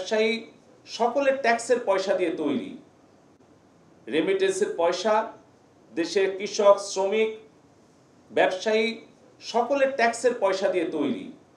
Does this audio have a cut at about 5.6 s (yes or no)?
no